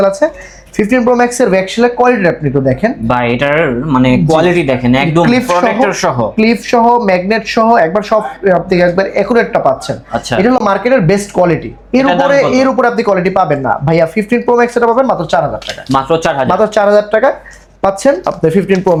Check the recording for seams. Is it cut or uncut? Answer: uncut